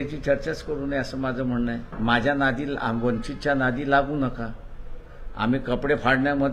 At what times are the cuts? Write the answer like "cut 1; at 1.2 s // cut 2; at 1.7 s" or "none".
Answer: cut 1; at 1.9 s